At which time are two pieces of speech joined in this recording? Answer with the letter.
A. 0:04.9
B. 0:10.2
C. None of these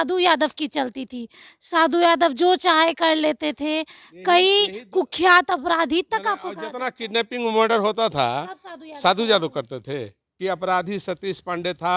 B